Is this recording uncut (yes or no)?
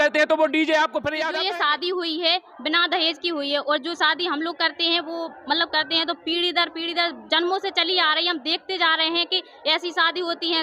no